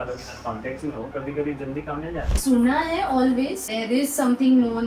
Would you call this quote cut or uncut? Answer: cut